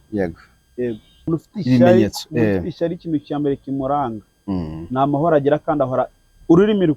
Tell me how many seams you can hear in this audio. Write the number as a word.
one